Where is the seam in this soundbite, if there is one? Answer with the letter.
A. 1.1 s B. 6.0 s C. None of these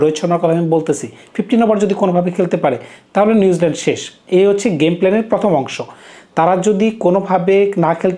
C